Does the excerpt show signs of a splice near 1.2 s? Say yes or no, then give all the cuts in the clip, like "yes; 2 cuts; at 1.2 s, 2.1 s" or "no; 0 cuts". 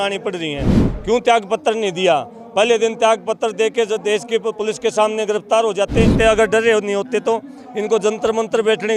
no; 1 cut; at 6.1 s